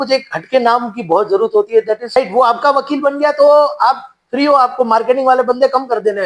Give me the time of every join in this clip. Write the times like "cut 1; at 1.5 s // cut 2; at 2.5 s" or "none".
cut 1; at 2.2 s

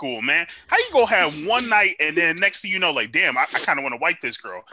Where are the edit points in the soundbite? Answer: none

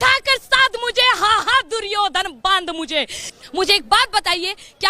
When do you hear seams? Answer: cut 1; at 3.3 s

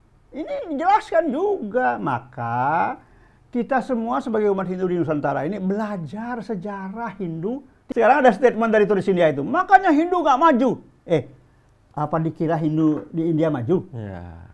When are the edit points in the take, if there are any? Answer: cut 1; at 7.7 s

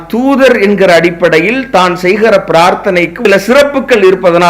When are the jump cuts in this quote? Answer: cut 1; at 3.1 s

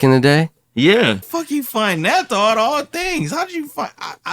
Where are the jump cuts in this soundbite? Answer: cut 1; at 1.3 s

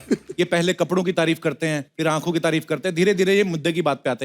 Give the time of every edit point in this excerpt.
cut 1; at 1.9 s

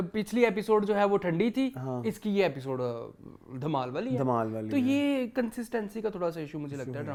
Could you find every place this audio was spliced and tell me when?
none

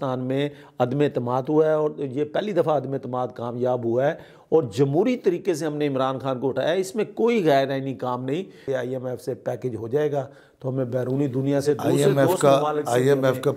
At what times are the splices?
cut 1; at 8.7 s

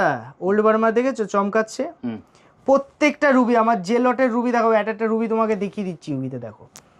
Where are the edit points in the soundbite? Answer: none

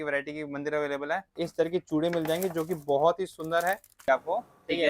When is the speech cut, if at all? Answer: cut 1; at 1.4 s // cut 2; at 4.1 s

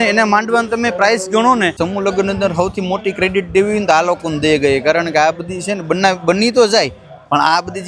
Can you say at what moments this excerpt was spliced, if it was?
cut 1; at 1.8 s

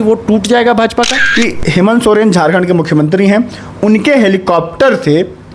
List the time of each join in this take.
cut 1; at 1.2 s

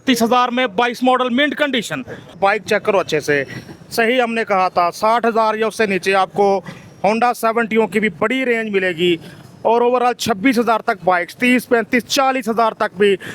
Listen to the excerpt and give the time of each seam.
cut 1; at 2.4 s

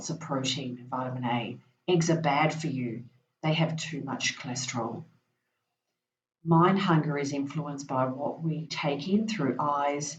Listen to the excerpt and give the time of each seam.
none

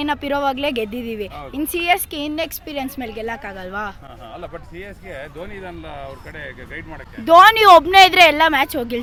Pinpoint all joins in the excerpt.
none

